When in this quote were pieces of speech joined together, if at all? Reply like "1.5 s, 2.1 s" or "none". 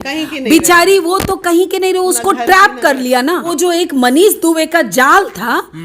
3.5 s